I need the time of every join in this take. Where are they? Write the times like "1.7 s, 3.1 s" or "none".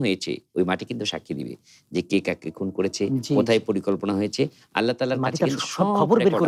none